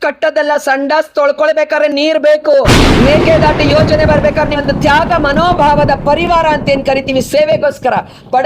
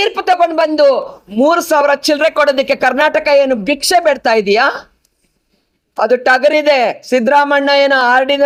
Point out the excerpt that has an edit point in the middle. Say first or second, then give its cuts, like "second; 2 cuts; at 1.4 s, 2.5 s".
first; 1 cut; at 4.6 s